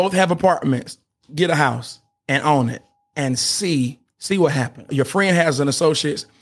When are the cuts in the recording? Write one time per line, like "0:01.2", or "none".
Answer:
0:04.1
0:04.9